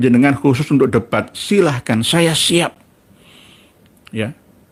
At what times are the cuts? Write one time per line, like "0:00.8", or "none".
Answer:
none